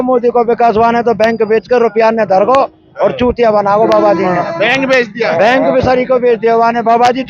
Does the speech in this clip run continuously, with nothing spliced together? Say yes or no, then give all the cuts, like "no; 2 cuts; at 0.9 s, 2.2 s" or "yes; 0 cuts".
yes; 0 cuts